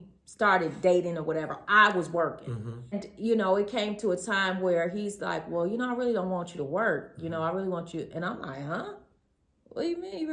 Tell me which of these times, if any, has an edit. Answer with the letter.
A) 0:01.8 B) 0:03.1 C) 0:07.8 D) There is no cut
B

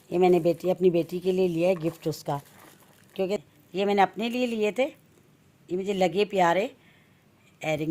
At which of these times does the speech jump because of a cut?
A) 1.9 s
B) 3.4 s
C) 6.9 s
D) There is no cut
B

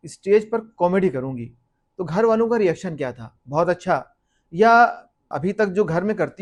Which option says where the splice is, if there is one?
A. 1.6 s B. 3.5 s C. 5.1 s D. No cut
D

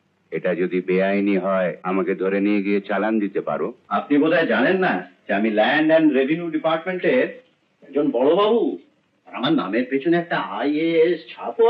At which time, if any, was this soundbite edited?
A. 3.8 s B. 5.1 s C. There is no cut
A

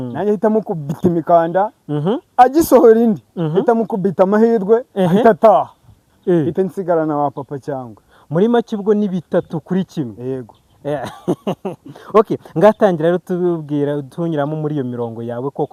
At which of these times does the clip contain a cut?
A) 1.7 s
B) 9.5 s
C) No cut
C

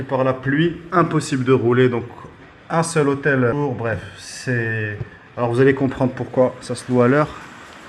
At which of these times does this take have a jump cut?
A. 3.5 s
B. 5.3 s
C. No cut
A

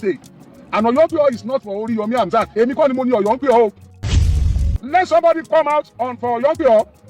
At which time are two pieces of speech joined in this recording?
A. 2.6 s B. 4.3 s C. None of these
B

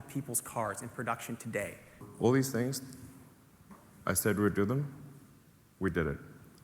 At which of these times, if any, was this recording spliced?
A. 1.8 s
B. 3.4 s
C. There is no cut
A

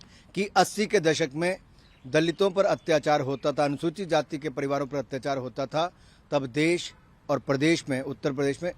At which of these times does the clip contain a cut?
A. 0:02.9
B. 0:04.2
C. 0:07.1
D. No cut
D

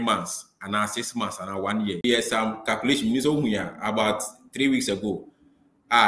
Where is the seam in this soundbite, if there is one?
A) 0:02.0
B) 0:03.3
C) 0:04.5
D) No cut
A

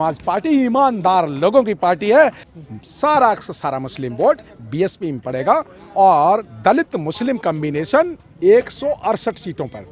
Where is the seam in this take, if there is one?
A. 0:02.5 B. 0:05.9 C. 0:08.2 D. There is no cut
A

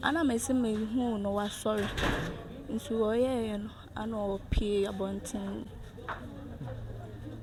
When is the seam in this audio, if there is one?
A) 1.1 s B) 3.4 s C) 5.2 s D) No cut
D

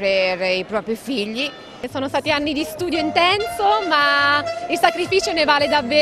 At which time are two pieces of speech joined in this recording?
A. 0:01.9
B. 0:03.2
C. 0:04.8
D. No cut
A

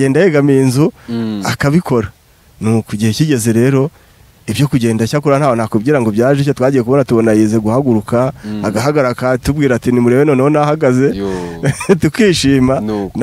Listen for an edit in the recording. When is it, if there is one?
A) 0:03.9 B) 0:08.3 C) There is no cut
C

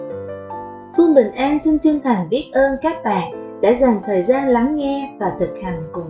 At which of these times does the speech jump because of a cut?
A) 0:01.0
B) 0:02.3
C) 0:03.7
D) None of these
A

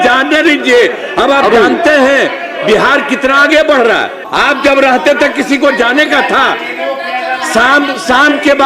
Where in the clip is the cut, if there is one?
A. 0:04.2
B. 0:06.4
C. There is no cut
A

